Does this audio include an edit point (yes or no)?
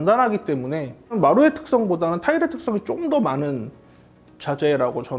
no